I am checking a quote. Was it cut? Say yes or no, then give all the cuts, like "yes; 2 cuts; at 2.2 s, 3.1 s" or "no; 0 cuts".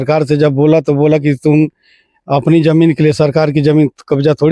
no; 0 cuts